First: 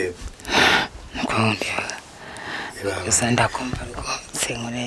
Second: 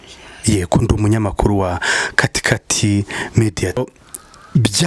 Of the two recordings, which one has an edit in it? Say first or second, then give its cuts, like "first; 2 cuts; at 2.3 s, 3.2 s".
second; 1 cut; at 3.8 s